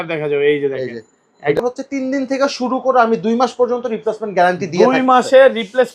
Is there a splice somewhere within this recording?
yes; 1 cut; at 1.6 s

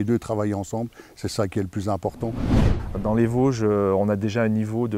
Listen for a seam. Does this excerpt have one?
yes; 1 cut; at 2.7 s

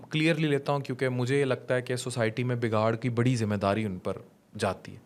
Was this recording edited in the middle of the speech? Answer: no; 0 cuts

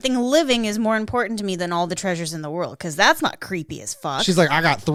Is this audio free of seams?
yes; 0 cuts

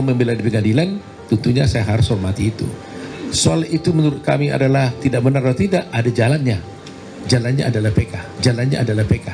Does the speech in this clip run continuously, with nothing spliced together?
yes; 0 cuts

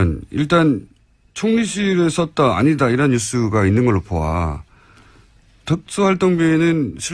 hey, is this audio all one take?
no; 1 cut; at 5.9 s

